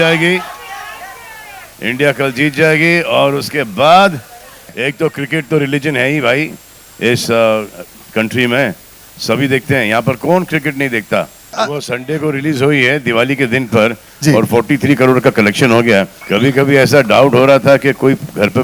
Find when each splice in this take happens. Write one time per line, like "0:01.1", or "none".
0:04.7
0:11.5
0:16.2